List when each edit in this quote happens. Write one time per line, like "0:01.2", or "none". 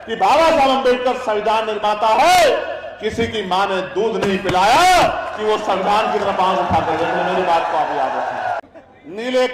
0:08.6